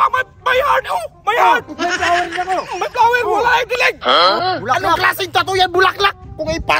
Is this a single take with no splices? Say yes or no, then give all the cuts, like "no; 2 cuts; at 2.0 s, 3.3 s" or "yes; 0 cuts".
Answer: no; 1 cut; at 4.3 s